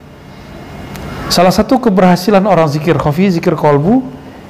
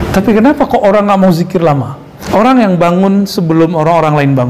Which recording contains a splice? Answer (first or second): second